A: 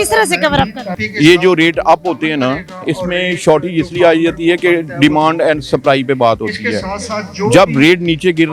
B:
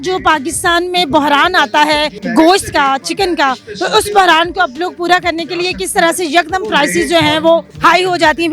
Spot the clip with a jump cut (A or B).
B